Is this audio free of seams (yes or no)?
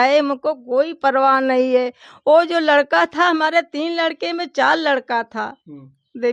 yes